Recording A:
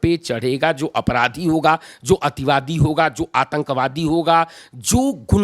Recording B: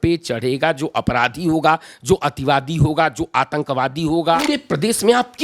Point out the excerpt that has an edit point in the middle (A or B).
B